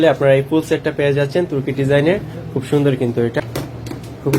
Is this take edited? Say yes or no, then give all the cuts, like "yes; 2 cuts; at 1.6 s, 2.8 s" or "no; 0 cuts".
yes; 1 cut; at 3.4 s